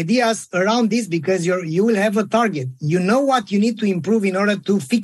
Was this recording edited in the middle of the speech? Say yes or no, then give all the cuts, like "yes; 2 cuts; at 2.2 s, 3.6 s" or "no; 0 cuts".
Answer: no; 0 cuts